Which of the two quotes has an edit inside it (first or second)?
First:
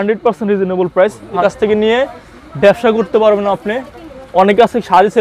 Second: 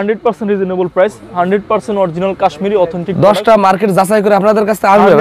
first